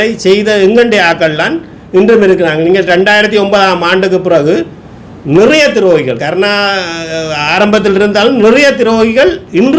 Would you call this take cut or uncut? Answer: uncut